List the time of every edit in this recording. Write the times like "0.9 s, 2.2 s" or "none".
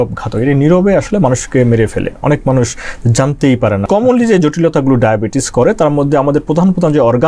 3.9 s

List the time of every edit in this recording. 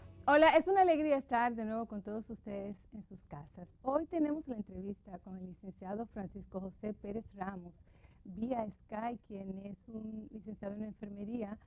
8.8 s

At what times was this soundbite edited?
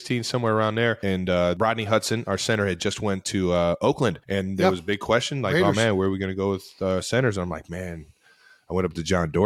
1.6 s, 4.2 s

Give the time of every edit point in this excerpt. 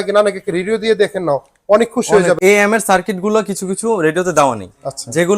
2.4 s

